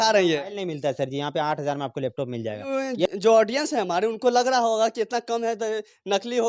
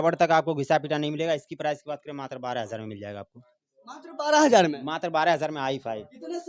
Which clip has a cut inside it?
first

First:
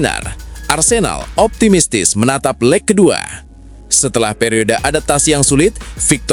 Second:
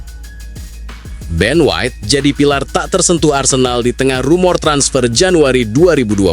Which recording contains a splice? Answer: second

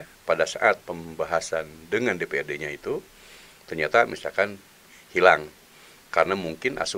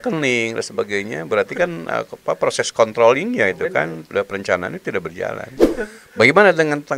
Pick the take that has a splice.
second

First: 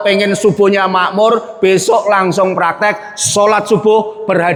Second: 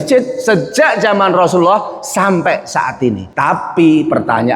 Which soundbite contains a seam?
second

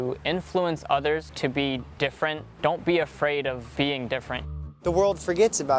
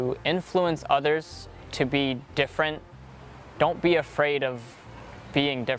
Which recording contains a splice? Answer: first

